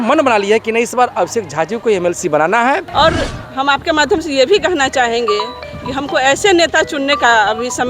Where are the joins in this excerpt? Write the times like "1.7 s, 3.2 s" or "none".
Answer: 2.9 s